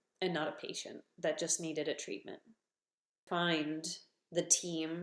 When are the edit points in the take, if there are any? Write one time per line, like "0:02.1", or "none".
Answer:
0:03.2